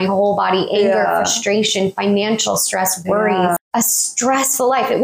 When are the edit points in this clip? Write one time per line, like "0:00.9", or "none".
0:03.6